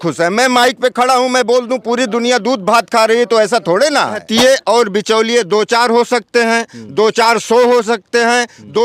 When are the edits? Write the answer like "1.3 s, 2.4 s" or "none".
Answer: 4.2 s